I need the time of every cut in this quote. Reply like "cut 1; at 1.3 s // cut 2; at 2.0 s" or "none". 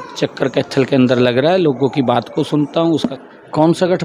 cut 1; at 3.0 s